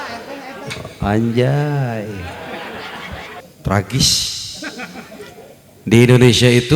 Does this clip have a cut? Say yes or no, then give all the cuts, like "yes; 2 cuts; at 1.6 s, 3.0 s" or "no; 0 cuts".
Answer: yes; 1 cut; at 3.4 s